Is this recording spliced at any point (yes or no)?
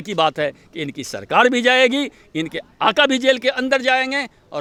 no